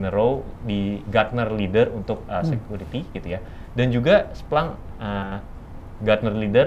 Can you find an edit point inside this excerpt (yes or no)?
no